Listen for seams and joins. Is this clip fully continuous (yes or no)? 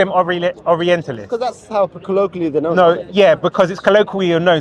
yes